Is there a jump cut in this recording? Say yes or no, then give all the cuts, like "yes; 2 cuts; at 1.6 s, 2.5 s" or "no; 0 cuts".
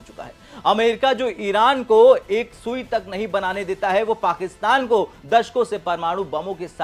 no; 0 cuts